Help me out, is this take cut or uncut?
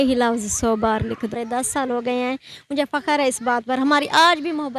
cut